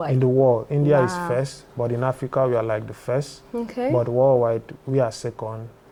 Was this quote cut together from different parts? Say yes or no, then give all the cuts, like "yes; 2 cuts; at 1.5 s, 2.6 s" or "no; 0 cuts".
no; 0 cuts